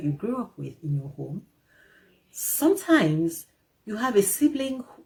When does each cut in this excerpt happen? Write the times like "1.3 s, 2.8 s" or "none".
none